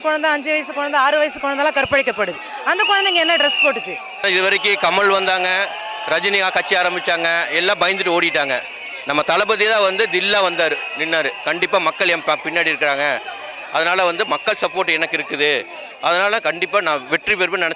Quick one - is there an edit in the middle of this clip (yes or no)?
yes